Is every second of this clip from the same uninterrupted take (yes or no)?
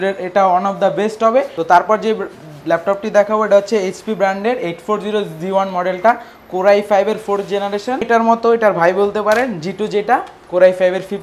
no